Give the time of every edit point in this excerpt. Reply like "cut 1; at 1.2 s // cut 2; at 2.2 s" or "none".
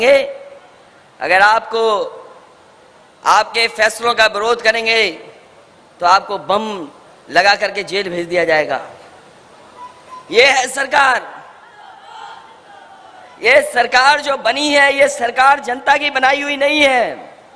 none